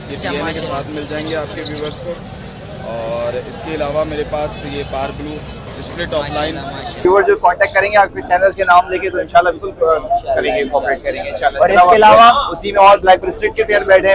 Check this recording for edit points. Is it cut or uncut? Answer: cut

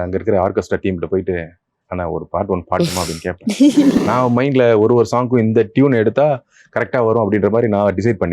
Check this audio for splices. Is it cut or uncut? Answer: cut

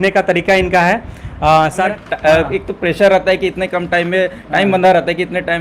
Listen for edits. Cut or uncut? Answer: cut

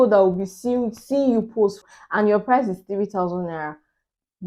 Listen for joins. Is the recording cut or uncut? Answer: cut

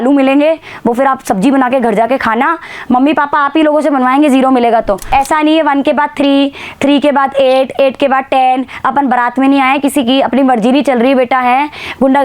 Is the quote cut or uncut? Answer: cut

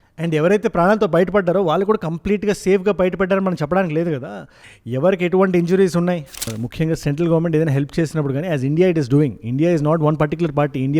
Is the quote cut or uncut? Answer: cut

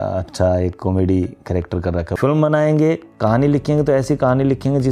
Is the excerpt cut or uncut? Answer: cut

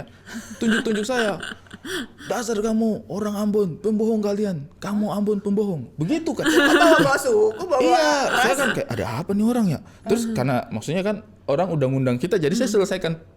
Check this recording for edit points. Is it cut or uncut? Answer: uncut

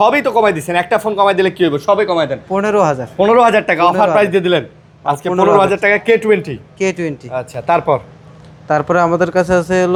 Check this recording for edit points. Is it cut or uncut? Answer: uncut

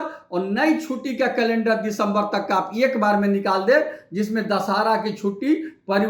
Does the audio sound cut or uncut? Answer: uncut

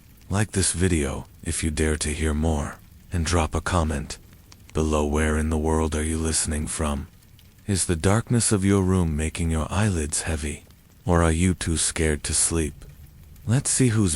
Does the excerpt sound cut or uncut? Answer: uncut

